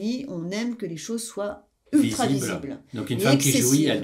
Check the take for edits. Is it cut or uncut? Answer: uncut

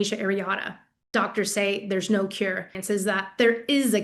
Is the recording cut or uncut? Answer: cut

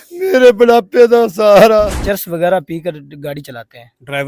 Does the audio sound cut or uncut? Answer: cut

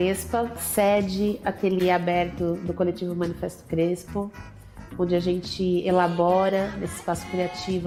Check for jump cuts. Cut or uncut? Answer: uncut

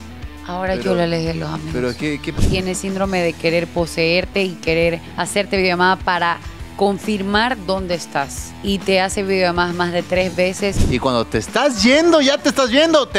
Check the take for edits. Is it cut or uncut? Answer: cut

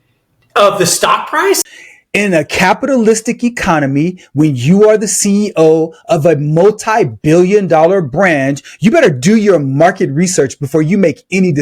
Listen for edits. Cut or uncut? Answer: cut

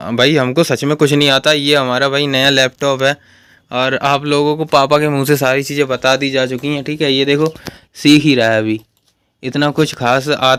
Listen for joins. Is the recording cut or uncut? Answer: uncut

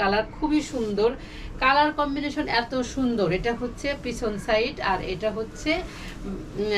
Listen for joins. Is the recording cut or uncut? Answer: uncut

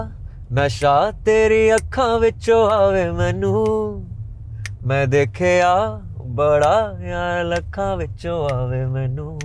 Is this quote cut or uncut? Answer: uncut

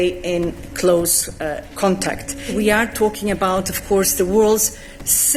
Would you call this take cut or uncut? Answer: uncut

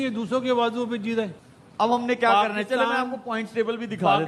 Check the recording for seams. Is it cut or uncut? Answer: cut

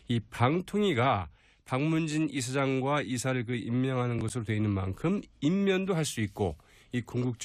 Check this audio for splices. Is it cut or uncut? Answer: uncut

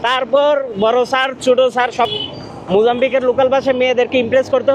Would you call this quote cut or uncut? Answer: cut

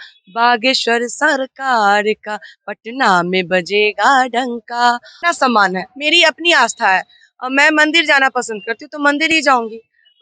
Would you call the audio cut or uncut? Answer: cut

